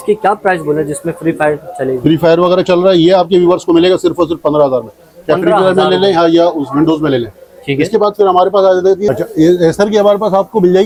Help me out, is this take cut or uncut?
uncut